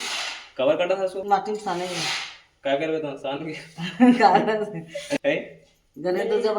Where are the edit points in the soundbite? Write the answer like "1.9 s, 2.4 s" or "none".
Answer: 1.2 s, 5.2 s